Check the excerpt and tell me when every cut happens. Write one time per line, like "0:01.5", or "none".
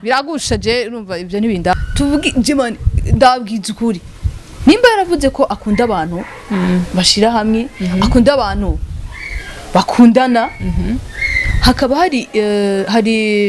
0:01.7